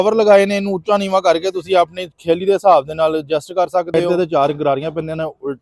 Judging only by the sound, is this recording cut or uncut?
cut